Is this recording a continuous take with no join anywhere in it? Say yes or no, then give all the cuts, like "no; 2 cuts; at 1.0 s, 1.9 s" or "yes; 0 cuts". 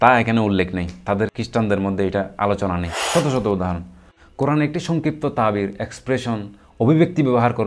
no; 2 cuts; at 1.4 s, 2.9 s